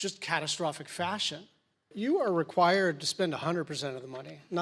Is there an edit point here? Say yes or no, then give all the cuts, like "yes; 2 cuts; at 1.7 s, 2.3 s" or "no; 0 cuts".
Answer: yes; 1 cut; at 1.9 s